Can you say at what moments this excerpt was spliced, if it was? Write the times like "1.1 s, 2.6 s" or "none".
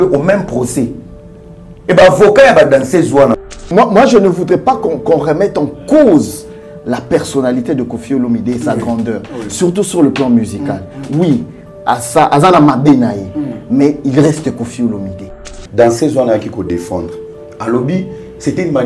3.4 s, 15.6 s